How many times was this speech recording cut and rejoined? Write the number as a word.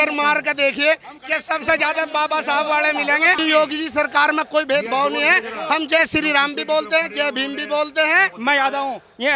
two